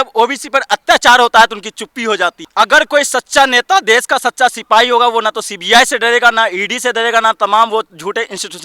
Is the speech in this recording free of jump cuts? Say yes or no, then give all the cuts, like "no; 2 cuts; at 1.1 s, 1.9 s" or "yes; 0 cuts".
no; 1 cut; at 2.4 s